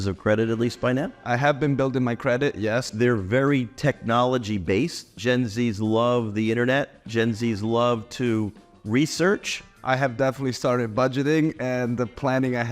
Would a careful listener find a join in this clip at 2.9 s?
yes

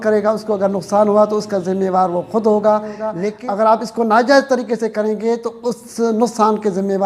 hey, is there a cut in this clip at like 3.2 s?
yes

